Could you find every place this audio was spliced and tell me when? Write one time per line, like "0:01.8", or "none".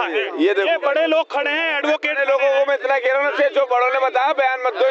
none